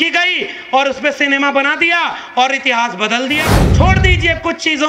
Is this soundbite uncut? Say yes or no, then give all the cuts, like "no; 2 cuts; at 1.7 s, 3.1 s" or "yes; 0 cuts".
no; 1 cut; at 3.6 s